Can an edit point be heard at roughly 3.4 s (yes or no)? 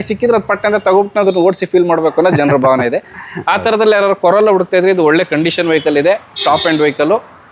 no